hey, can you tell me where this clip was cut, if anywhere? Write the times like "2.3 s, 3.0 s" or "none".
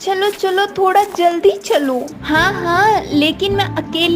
2.1 s